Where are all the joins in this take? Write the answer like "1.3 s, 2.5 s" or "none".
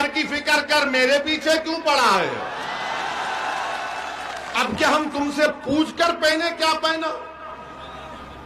none